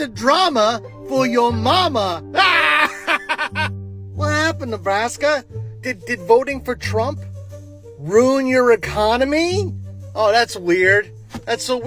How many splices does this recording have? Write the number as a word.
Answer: zero